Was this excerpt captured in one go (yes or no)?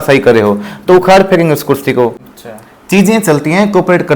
no